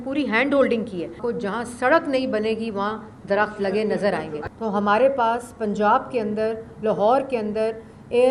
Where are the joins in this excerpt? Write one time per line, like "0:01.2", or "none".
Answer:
0:01.2
0:04.4